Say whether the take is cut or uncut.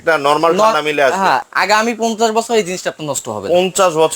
cut